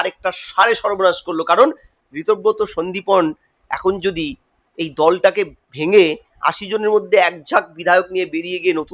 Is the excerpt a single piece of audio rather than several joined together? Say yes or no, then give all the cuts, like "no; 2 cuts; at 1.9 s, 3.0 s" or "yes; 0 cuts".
yes; 0 cuts